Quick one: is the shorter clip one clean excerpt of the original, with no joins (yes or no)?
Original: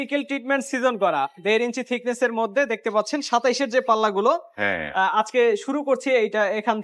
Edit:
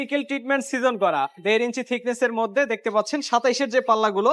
yes